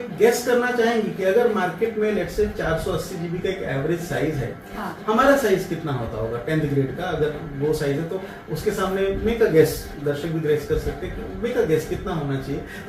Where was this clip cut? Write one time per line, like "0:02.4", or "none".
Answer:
none

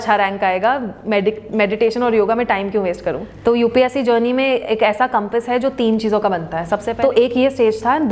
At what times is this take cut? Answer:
0:03.3
0:06.9

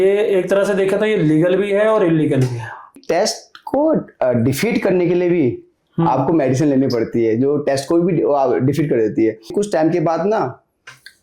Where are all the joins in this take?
0:03.0
0:09.5

